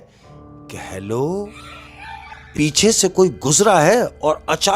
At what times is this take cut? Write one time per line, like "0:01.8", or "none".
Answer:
0:02.5